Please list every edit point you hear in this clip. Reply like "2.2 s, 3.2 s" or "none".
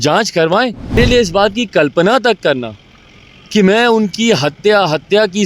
1.0 s